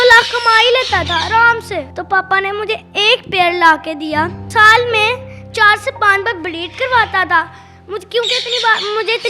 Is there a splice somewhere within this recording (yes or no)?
yes